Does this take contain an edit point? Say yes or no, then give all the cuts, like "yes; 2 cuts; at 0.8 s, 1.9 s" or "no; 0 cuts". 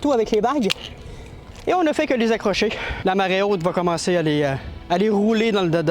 yes; 2 cuts; at 2.9 s, 4.7 s